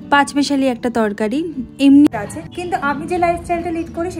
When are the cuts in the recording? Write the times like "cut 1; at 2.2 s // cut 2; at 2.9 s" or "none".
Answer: cut 1; at 2.1 s